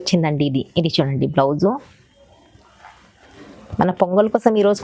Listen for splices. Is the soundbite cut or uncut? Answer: uncut